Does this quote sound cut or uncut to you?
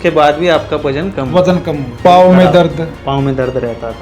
cut